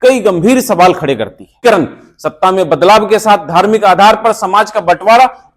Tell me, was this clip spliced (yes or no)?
yes